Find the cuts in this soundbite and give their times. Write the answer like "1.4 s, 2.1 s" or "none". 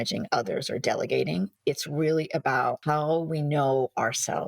2.8 s